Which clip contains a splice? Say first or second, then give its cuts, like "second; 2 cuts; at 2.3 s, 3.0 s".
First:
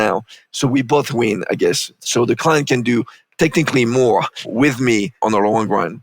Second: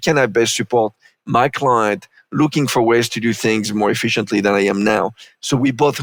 first; 3 cuts; at 3.2 s, 4.4 s, 5.2 s